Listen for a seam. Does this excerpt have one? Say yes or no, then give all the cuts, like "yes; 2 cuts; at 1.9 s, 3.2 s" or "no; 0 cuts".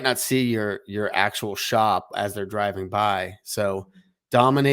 no; 0 cuts